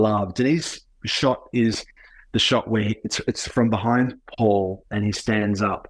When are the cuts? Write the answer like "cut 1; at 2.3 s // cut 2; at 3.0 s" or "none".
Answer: none